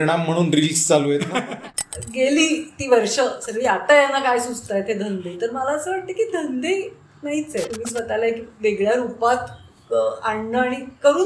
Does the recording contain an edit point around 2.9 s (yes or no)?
no